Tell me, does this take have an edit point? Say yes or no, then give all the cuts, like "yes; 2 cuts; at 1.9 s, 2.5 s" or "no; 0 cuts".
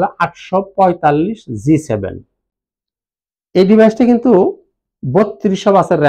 no; 0 cuts